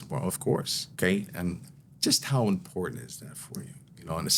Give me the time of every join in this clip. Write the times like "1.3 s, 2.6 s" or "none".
1.3 s

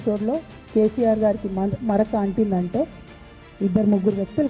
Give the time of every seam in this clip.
none

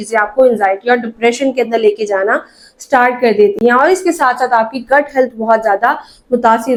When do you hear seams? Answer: none

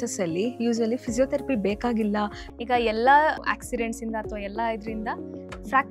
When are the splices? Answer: 2.4 s, 3.4 s

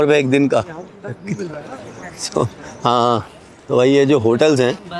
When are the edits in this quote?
none

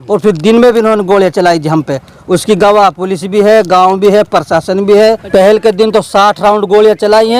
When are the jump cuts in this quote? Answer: 5.2 s

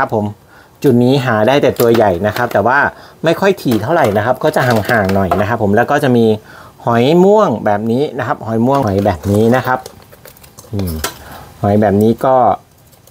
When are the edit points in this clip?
8.8 s

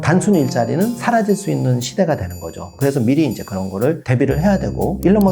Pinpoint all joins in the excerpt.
1.0 s, 2.6 s

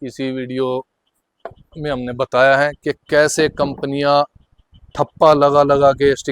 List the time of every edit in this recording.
none

